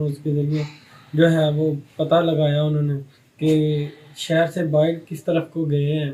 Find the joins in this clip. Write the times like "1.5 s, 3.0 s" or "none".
none